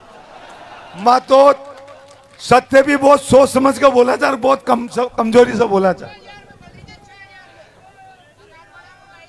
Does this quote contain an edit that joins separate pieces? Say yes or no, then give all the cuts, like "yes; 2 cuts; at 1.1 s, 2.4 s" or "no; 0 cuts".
no; 0 cuts